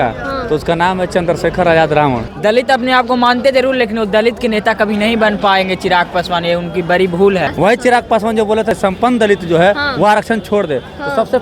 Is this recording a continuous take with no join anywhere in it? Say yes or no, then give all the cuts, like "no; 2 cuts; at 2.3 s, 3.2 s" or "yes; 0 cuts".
no; 3 cuts; at 2.3 s, 7.5 s, 8.8 s